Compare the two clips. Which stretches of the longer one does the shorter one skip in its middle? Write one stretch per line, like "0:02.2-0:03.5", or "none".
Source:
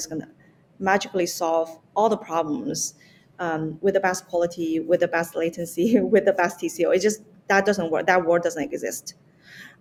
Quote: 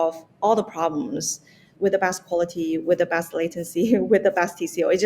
0:03.2-0:03.7